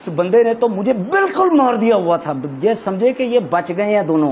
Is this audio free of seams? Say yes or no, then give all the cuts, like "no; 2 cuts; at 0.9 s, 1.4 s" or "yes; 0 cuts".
yes; 0 cuts